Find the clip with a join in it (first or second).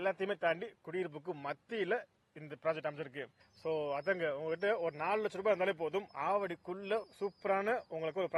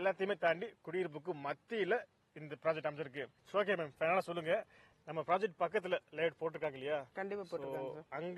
first